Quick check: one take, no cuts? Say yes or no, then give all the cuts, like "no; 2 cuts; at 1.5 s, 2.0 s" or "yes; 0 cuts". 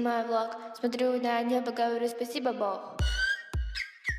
yes; 0 cuts